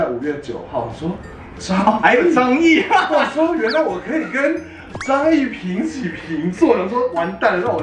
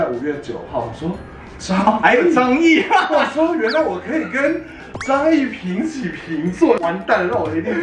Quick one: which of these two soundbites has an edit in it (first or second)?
second